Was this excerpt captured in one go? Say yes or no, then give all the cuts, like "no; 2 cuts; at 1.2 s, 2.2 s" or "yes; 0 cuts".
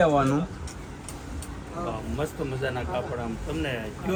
yes; 0 cuts